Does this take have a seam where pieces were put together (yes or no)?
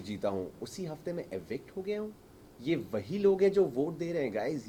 no